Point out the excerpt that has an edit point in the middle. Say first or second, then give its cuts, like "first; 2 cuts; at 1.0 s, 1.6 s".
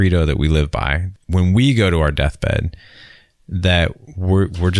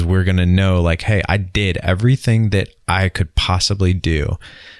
first; 1 cut; at 1.1 s